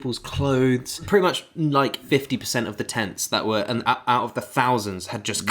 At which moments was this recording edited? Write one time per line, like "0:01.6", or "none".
0:01.0
0:02.0